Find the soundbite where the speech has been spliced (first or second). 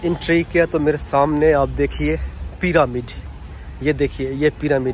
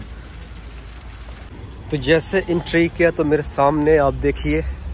second